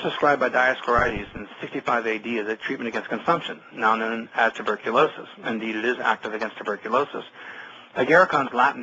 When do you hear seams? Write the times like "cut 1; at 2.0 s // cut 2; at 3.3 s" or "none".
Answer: cut 1; at 4.3 s